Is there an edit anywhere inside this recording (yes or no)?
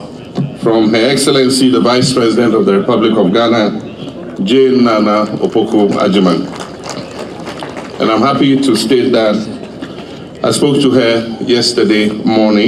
no